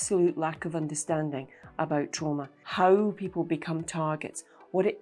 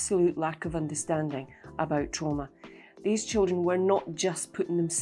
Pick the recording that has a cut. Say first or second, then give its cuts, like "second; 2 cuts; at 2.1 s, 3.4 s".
first; 1 cut; at 2.6 s